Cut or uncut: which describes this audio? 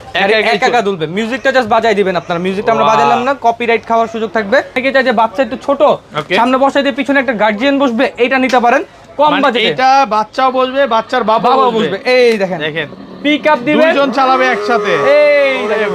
cut